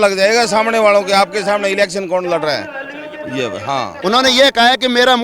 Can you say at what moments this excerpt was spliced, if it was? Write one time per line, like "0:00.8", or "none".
0:03.9